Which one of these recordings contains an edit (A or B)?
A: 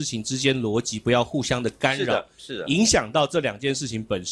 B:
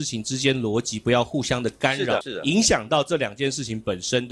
B